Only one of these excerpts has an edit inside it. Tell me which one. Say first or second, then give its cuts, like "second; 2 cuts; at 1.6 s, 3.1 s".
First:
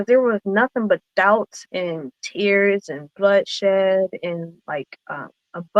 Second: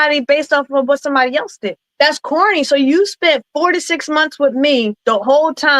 second; 2 cuts; at 1.8 s, 5.0 s